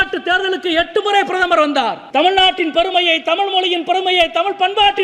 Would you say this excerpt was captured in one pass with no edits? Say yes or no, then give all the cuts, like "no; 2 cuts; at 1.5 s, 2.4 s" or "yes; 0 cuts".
no; 1 cut; at 2.0 s